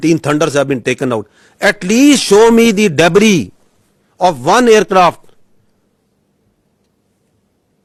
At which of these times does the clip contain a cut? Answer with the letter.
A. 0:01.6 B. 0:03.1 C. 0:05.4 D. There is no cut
D